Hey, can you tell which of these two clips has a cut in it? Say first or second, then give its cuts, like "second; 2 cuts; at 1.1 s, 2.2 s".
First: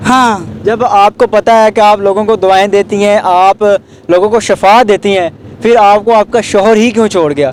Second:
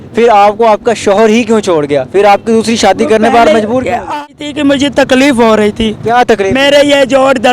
second; 1 cut; at 4.2 s